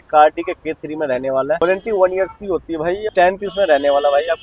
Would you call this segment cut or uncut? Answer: cut